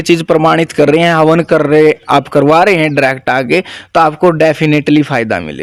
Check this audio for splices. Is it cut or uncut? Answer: uncut